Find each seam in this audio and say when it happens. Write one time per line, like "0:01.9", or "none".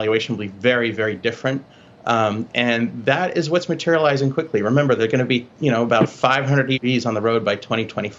none